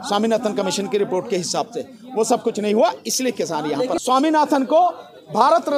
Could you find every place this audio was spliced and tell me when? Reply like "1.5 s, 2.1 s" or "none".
4.0 s